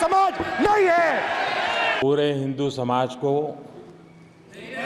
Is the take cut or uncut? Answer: cut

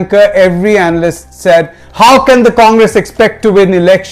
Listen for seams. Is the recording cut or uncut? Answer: uncut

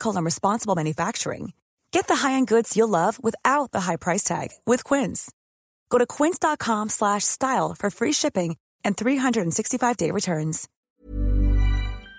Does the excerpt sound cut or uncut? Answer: cut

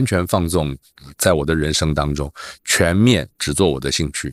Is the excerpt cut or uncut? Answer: uncut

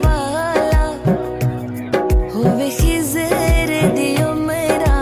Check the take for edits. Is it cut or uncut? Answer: uncut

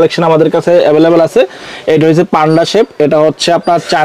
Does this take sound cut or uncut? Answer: uncut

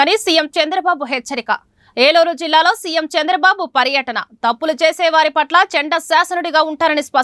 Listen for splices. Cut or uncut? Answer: uncut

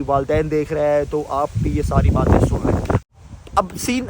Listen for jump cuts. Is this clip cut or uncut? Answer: cut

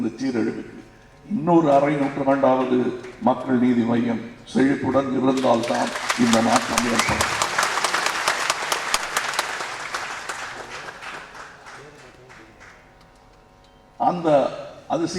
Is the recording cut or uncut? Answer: uncut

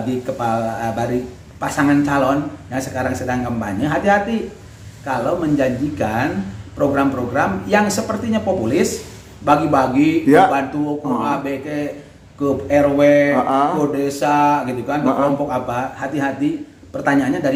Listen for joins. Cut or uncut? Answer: uncut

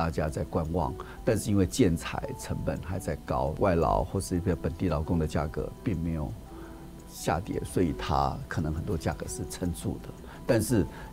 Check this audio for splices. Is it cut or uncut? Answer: uncut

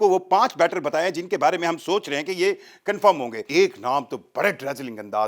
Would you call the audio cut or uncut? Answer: cut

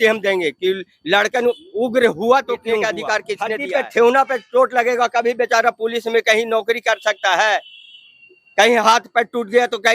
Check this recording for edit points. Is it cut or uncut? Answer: cut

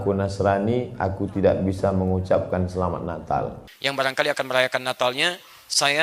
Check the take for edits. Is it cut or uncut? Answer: cut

